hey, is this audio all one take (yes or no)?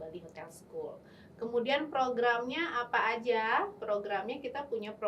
yes